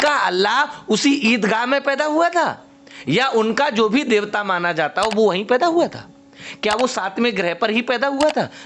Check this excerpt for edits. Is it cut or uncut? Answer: uncut